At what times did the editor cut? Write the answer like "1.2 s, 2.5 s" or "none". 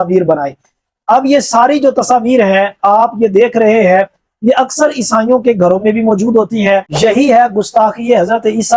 6.9 s